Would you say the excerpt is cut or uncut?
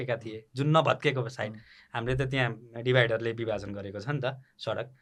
uncut